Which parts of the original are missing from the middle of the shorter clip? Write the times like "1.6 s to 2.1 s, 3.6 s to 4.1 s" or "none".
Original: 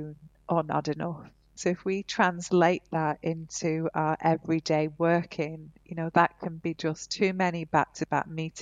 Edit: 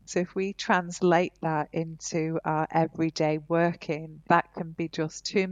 5.6 s to 6.0 s